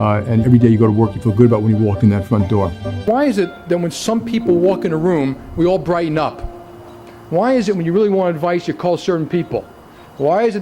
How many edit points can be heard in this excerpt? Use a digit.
1